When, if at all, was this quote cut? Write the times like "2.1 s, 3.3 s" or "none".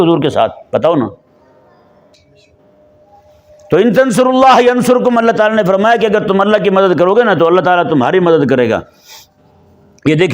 none